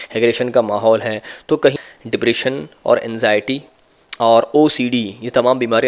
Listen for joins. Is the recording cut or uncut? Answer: cut